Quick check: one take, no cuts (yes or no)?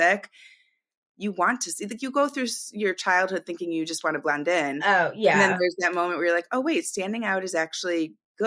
no